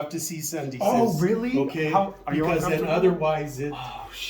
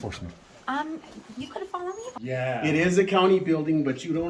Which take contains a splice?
second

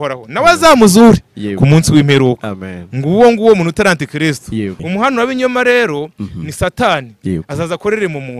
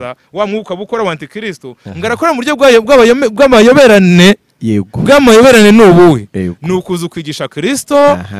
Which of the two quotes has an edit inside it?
first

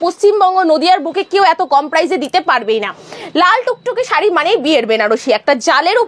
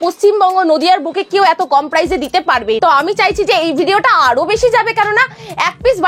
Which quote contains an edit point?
second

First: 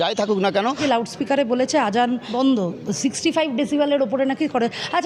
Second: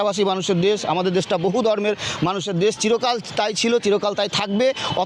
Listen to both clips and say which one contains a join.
first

